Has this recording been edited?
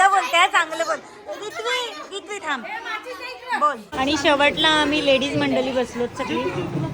yes; 1 cut; at 3.9 s

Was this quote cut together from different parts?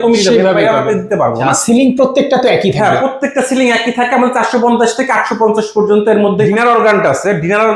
yes; 2 cuts; at 1.5 s, 6.5 s

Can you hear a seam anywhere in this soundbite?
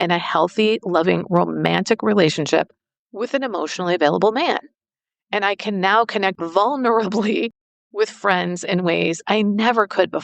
yes; 1 cut; at 6.4 s

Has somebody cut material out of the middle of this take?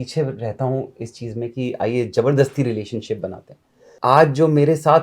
yes; 1 cut; at 3.9 s

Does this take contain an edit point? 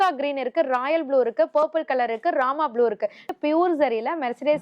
yes; 1 cut; at 3.3 s

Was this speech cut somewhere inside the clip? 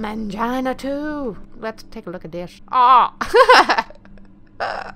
yes; 2 cuts; at 1.5 s, 2.6 s

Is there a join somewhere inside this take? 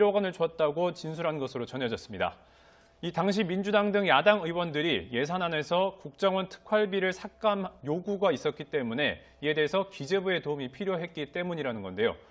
yes; 1 cut; at 8.8 s

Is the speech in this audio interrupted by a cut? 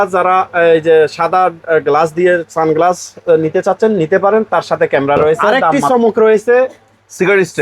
yes; 1 cut; at 5.8 s

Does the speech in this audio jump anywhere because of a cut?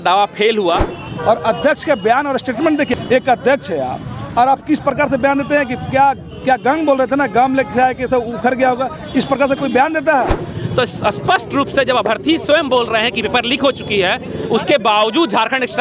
yes; 3 cuts; at 1.0 s, 2.9 s, 10.5 s

